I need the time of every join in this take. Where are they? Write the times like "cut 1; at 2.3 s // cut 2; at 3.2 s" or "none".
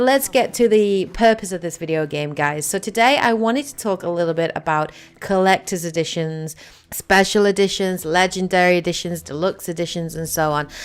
cut 1; at 2.3 s